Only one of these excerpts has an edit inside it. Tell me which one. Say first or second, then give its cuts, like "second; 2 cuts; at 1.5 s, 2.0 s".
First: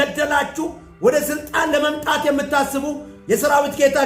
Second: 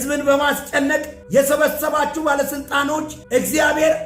second; 2 cuts; at 1.1 s, 3.2 s